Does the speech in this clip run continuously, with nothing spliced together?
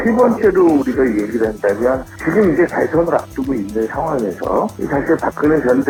yes; 0 cuts

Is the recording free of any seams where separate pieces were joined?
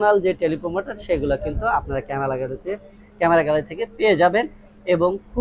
yes; 0 cuts

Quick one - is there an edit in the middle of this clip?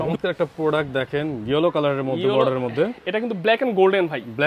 no; 0 cuts

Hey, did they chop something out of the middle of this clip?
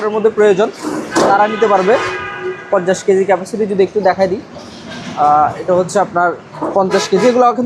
no; 0 cuts

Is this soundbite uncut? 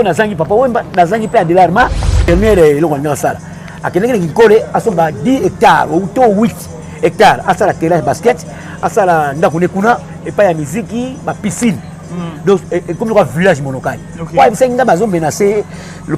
no; 1 cut; at 2.3 s

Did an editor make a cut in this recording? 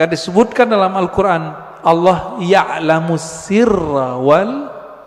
no; 0 cuts

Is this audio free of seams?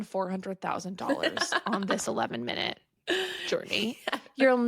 no; 1 cut; at 2.9 s

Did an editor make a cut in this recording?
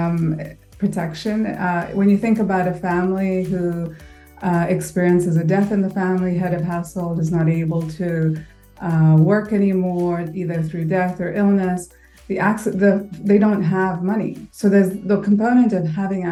no; 0 cuts

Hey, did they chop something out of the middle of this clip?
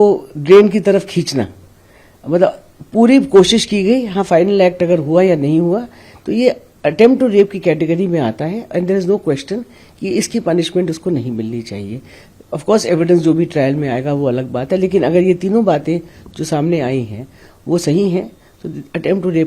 no; 0 cuts

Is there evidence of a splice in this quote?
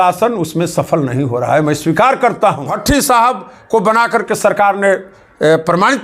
yes; 1 cut; at 2.7 s

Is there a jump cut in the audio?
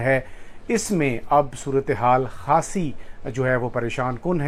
no; 0 cuts

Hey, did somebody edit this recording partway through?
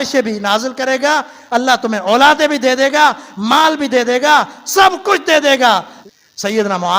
yes; 1 cut; at 5.9 s

